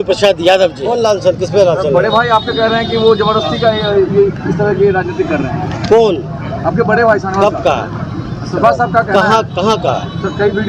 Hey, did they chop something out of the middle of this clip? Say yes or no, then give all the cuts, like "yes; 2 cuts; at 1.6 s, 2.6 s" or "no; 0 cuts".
yes; 1 cut; at 1.0 s